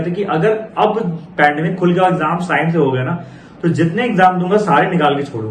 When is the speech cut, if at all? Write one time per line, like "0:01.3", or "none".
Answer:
none

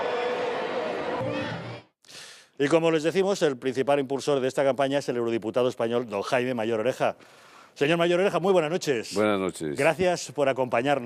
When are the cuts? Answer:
0:04.4

